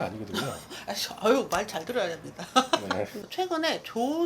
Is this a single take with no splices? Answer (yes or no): no